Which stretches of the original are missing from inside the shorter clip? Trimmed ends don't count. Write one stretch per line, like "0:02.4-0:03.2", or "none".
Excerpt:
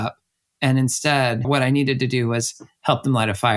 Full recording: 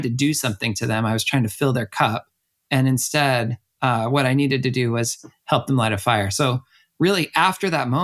0:03.5-0:04.1

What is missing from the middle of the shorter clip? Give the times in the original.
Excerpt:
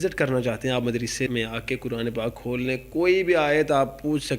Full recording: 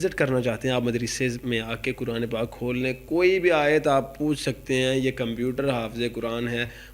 0:01.3-0:01.4

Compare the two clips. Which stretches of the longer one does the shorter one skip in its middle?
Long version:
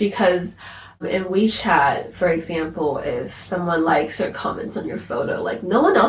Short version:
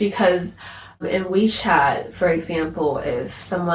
none

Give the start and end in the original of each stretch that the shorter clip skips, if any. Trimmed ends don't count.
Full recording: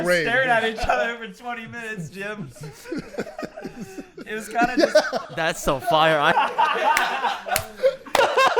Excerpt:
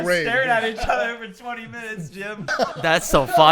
0:02.5-0:05.1

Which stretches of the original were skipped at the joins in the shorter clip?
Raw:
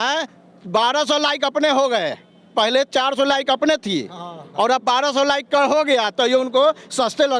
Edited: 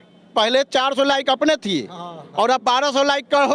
none

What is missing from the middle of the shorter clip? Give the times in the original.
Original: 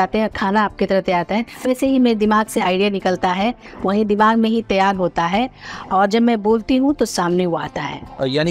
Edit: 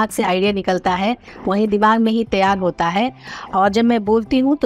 none

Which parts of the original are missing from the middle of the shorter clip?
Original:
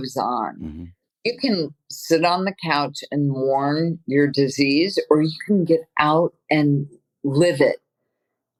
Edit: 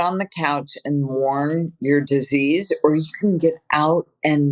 none

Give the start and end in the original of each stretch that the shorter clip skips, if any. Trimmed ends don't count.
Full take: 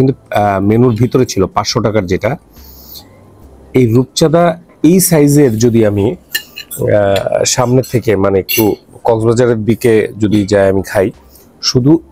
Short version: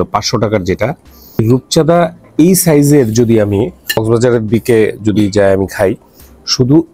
0:02.8-0:03.8
0:06.5-0:09.2

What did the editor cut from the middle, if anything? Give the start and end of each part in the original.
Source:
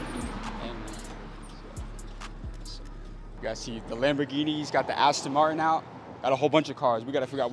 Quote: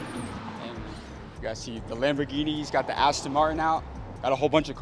0:01.3-0:03.3

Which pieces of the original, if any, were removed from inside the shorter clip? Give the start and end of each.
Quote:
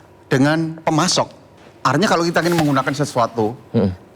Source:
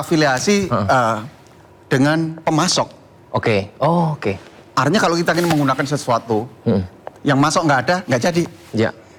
0:03.2-0:04.5

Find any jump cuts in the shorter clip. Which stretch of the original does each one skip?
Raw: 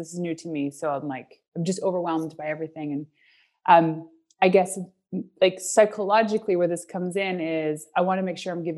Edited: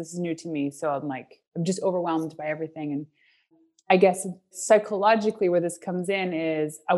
0:03.5-0:04.0
0:05.1-0:05.6

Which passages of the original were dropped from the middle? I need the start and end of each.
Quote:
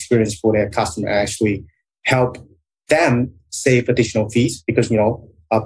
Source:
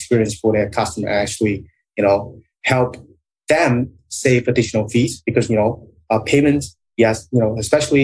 0:01.8-0:02.4

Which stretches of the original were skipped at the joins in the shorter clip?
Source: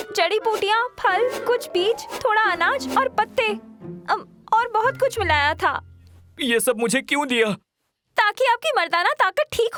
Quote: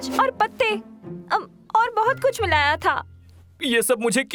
none

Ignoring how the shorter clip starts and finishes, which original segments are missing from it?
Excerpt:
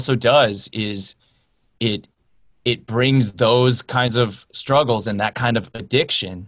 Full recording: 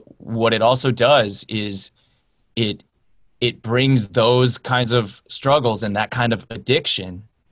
none

